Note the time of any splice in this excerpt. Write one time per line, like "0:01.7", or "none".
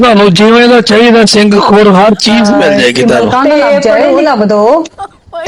0:03.8